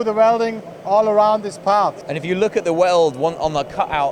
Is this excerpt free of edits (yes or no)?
no